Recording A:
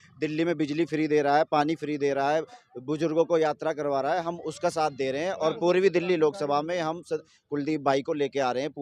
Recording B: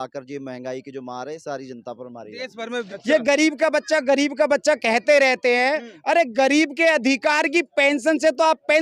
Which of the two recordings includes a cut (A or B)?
B